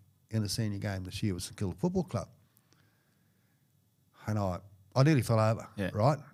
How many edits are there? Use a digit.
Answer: 0